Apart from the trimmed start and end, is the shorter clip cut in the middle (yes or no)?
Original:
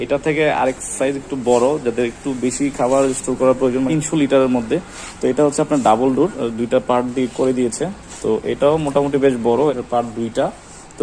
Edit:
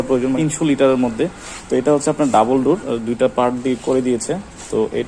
no